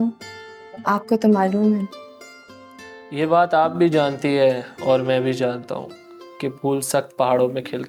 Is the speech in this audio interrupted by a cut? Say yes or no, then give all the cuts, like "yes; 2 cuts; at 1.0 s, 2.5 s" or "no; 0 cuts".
no; 0 cuts